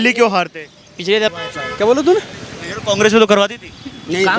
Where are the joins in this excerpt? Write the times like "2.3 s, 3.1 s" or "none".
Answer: 1.3 s

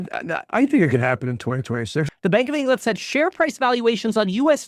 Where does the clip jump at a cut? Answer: 2.1 s

